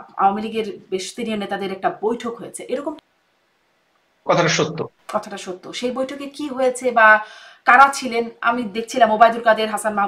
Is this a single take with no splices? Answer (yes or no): no